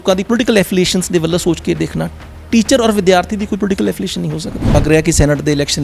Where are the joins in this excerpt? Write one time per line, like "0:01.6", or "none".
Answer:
0:04.8

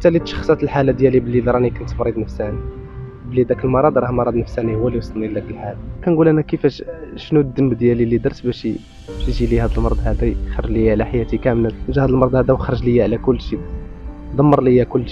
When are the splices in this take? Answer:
0:05.7
0:11.8

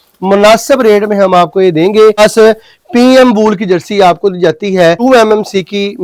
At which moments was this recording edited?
0:02.2
0:05.0

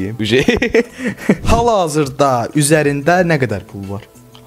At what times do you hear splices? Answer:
none

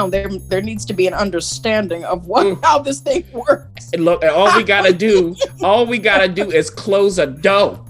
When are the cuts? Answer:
none

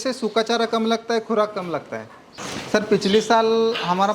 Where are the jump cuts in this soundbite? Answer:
0:02.4

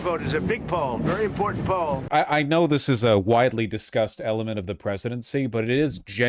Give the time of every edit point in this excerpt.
0:02.0

